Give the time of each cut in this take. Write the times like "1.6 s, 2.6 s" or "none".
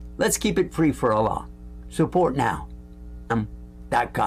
3.3 s